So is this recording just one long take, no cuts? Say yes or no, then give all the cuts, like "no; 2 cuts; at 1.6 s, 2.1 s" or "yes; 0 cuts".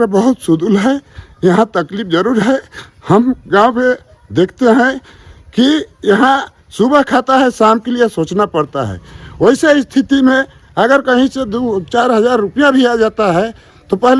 yes; 0 cuts